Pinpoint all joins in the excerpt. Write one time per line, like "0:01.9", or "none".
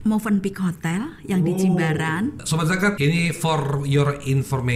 0:02.4